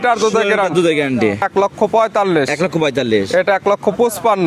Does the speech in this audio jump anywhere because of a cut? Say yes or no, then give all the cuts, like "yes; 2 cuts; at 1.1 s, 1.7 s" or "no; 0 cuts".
yes; 1 cut; at 1.5 s